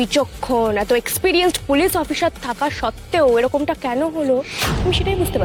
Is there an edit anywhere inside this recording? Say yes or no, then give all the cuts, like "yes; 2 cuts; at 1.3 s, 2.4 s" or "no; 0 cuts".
no; 0 cuts